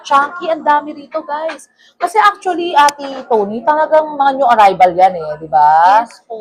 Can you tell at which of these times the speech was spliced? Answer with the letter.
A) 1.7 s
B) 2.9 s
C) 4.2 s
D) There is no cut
D